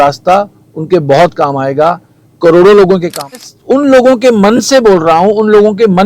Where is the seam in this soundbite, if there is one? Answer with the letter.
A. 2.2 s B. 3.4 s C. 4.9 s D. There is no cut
B